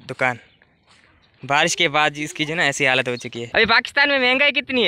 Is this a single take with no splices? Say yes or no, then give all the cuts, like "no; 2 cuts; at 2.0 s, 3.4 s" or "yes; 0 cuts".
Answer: no; 1 cut; at 3.4 s